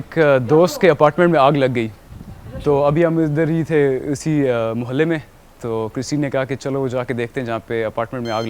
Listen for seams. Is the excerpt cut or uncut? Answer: uncut